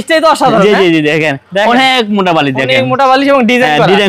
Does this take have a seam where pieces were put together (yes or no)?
no